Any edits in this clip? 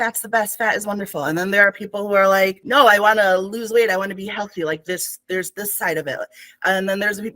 yes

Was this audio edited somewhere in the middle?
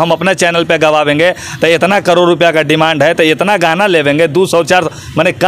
no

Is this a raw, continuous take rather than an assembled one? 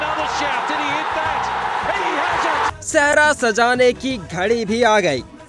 yes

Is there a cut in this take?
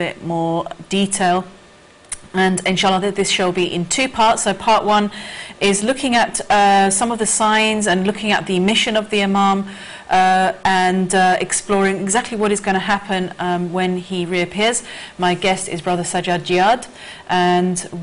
no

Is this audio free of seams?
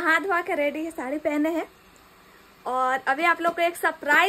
yes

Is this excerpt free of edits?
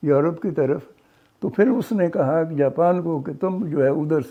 yes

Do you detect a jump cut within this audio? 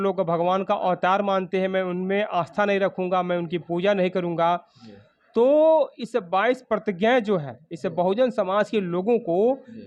no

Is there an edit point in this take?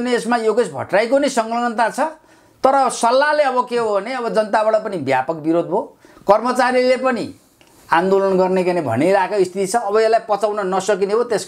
no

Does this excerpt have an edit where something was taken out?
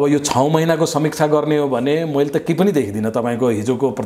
no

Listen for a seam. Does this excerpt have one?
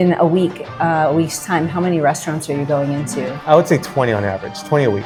no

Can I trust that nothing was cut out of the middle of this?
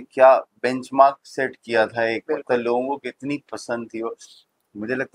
yes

